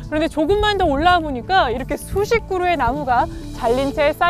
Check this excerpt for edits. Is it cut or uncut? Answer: uncut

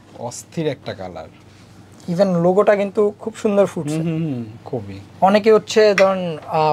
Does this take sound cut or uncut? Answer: uncut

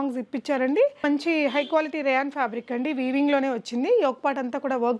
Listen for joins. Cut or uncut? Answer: cut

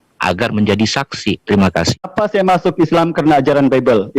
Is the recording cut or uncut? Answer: cut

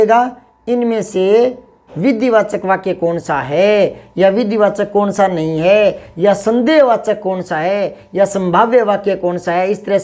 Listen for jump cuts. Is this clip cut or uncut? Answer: uncut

